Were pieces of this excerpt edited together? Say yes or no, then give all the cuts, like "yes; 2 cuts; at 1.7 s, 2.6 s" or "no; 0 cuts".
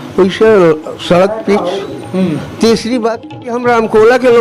yes; 1 cut; at 3.3 s